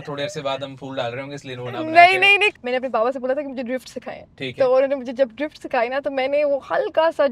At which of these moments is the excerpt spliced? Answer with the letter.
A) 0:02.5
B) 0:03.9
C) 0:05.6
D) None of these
A